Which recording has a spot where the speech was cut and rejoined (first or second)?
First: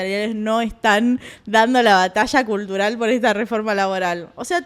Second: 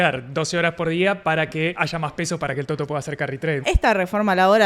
second